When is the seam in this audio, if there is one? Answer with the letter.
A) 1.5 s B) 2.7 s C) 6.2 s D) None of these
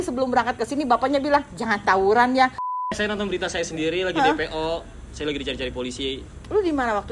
B